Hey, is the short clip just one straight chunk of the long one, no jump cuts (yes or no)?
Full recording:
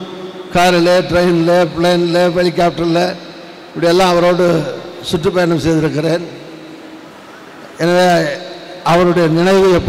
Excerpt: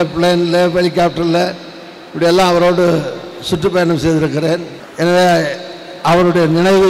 no